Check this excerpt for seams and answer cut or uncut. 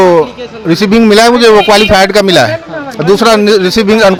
uncut